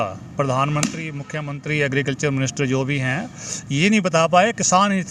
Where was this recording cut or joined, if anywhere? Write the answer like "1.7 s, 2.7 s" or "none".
none